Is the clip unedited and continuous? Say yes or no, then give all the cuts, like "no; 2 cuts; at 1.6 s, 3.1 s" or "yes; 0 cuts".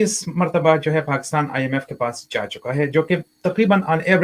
yes; 0 cuts